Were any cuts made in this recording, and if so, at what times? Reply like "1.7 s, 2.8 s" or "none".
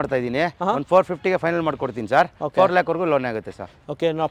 none

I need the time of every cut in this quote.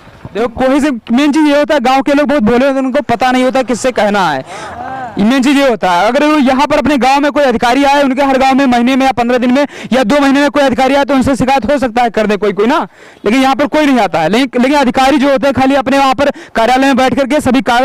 none

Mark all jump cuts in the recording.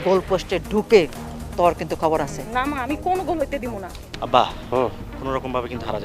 4.1 s

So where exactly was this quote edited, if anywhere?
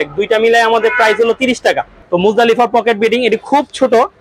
1.9 s

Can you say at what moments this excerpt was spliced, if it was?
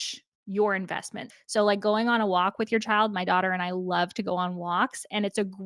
1.2 s

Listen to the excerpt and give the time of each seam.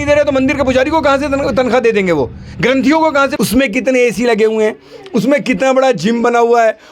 3.3 s

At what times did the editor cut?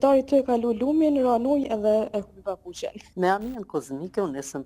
3.0 s

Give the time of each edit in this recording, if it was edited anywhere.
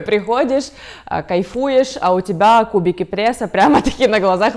none

